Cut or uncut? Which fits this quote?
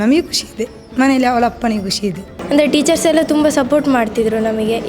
cut